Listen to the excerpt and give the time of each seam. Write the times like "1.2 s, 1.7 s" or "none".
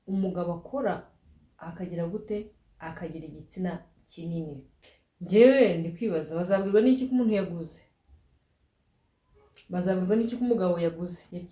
4.7 s

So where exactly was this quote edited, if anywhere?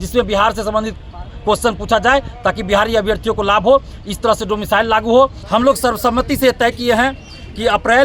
5.4 s

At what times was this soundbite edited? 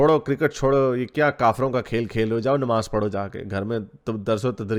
none

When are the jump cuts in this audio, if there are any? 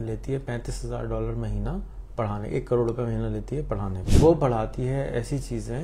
4.0 s

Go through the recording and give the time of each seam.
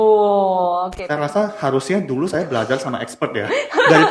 0.9 s

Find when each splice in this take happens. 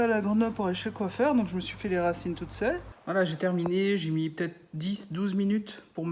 2.9 s

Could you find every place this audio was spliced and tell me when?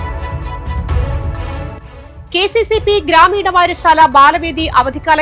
1.8 s

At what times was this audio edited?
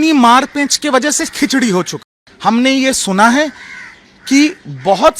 2.0 s

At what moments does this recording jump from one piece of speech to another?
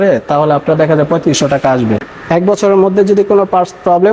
2.1 s

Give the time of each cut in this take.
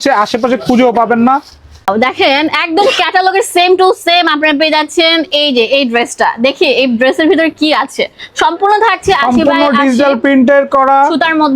1.9 s

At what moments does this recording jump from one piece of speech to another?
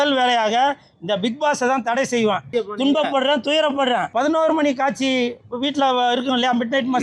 2.5 s, 4.1 s

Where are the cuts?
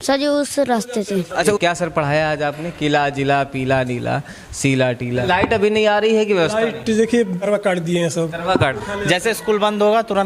1.3 s, 5.0 s, 7.4 s, 8.8 s

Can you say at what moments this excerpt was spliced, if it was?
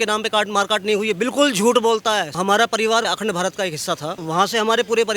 2.3 s, 3.1 s, 4.1 s

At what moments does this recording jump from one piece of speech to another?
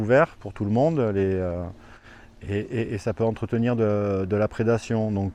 none

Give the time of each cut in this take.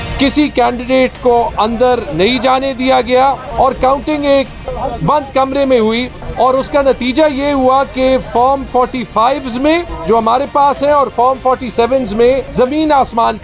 3.4 s, 4.6 s, 6.2 s, 9.9 s, 12.5 s

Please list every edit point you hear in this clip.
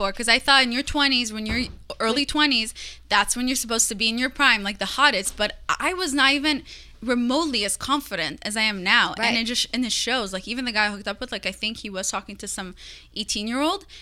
none

